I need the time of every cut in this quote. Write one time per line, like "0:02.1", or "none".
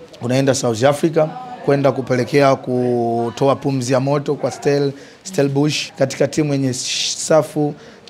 0:05.8